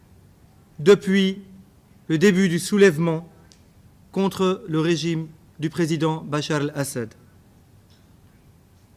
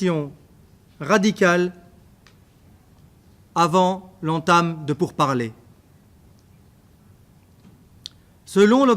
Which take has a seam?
second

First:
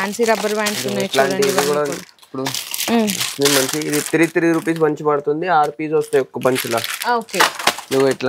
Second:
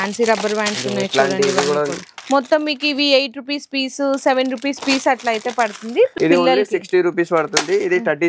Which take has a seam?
second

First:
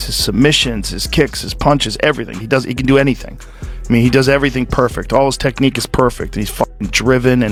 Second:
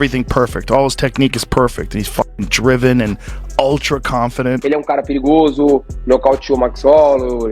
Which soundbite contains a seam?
second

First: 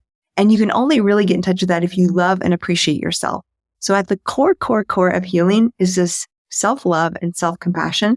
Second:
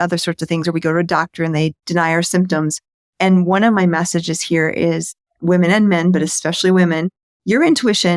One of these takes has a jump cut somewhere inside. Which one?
second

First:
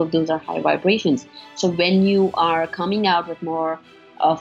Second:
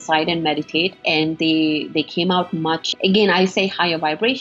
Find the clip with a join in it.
second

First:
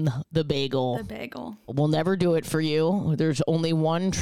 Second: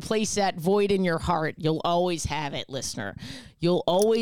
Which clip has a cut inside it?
first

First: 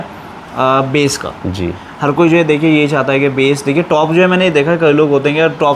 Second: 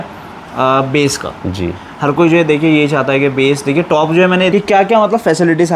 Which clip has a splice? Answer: second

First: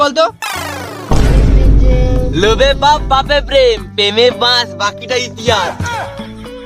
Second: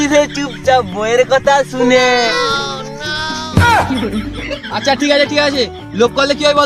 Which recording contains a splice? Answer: second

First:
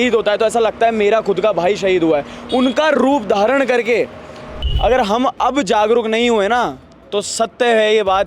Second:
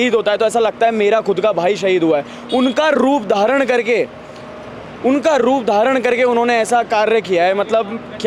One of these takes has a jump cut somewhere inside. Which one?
first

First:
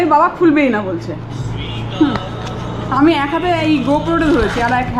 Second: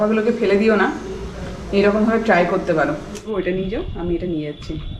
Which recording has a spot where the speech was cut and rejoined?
second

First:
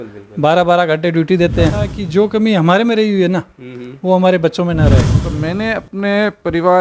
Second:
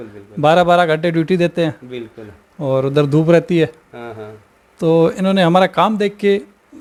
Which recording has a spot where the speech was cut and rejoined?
first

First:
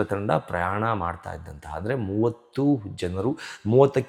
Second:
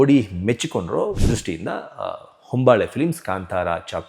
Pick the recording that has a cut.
second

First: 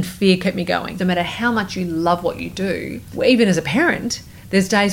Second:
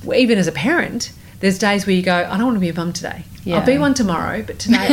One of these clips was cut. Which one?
first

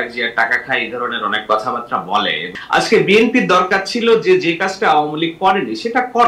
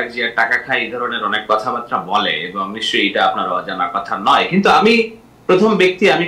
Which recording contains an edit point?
first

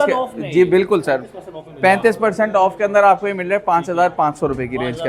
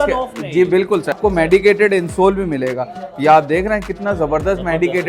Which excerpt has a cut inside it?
second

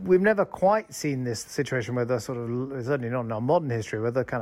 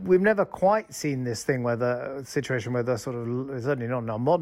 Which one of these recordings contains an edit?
first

